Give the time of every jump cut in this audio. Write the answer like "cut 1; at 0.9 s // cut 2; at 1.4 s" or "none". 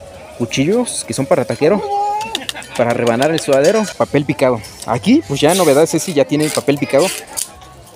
cut 1; at 3.9 s